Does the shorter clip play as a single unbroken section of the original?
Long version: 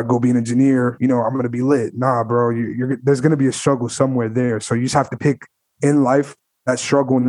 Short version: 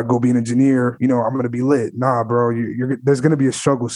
yes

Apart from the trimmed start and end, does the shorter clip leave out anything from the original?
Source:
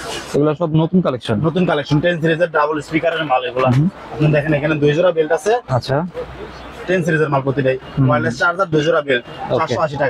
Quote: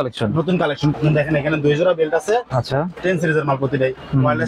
yes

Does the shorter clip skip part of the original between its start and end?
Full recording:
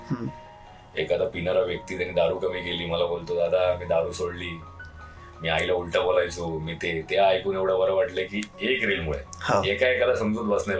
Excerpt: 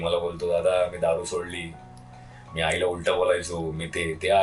no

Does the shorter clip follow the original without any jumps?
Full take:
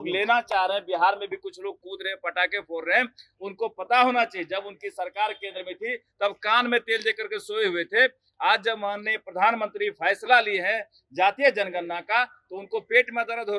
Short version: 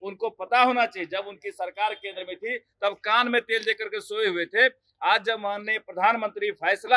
yes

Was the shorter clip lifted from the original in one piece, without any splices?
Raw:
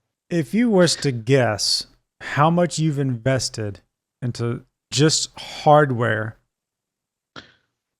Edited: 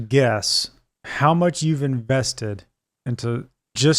yes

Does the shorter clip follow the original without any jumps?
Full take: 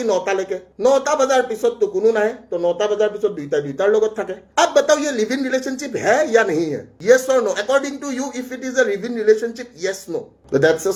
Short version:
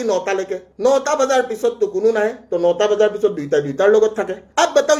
yes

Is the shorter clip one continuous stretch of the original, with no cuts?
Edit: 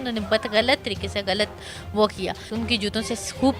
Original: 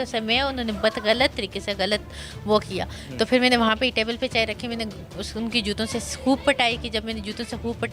no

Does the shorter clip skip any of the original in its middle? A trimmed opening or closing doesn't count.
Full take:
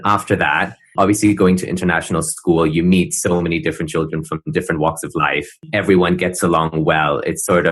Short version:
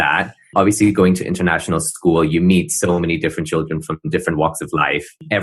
no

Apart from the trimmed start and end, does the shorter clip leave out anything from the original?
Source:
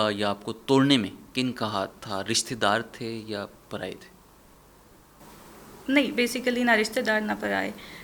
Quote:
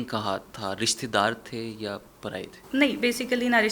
yes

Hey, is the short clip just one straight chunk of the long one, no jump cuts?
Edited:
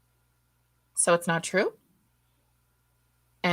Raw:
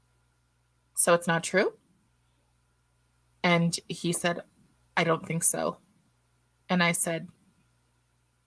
yes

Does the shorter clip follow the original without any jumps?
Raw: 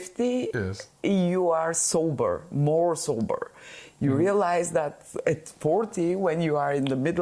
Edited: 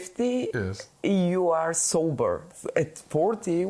no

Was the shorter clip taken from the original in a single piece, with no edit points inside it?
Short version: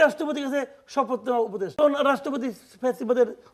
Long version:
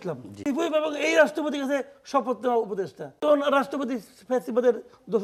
no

